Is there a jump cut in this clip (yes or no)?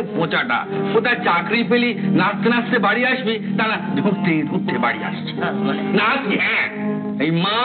no